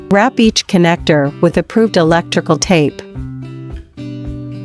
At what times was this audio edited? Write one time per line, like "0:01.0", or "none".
none